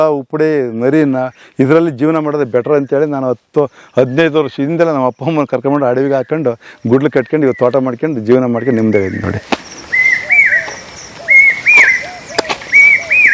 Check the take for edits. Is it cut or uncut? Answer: uncut